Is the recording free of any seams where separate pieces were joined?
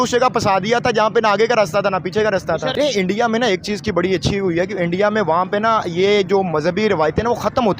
no; 1 cut; at 2.7 s

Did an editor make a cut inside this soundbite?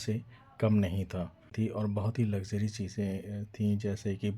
yes; 1 cut; at 1.5 s

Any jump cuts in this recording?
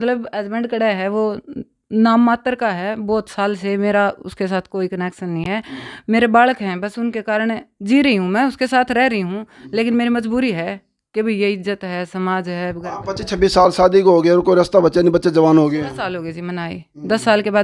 no; 0 cuts

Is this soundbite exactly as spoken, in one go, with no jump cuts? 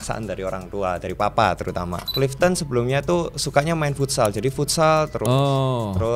no; 1 cut; at 2.0 s

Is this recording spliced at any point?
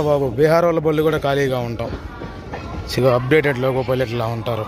yes; 1 cut; at 3.0 s

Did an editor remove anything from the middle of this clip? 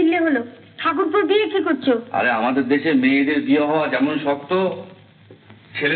no; 0 cuts

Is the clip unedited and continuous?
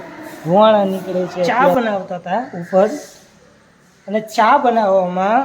no; 1 cut; at 1.5 s

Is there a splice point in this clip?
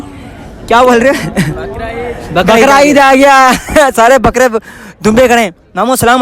no; 0 cuts

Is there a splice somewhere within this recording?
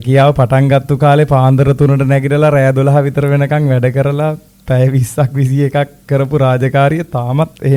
no; 0 cuts

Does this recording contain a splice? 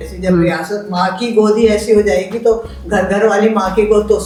no; 0 cuts

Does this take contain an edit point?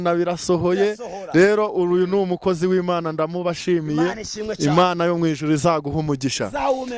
no; 0 cuts

